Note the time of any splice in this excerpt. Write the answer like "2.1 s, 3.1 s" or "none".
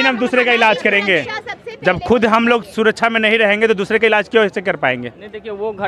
none